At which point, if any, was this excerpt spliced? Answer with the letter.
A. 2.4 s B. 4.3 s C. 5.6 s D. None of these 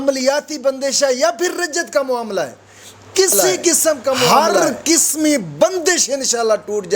B